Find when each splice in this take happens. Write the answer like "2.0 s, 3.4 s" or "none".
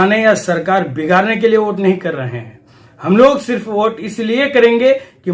none